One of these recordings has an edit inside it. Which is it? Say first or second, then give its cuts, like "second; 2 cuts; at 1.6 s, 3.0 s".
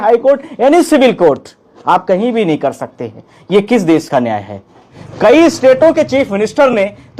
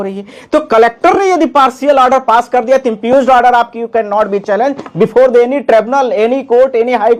first; 1 cut; at 5.0 s